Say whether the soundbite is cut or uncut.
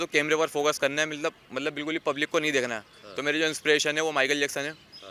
uncut